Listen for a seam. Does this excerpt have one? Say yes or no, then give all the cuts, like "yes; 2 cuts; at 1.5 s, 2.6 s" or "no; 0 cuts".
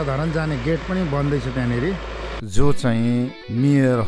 yes; 1 cut; at 2.4 s